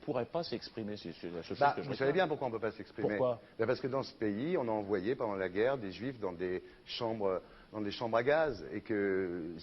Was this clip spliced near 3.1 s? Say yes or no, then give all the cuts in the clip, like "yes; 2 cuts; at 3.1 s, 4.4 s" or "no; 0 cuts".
yes; 1 cut; at 3.1 s